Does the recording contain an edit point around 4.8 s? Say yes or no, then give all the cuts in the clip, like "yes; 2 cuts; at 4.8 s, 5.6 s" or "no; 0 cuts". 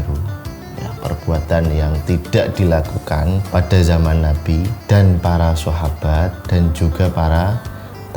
yes; 3 cuts; at 3.5 s, 4.8 s, 6.4 s